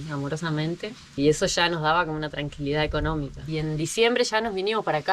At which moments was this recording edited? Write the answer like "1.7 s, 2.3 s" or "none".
3.4 s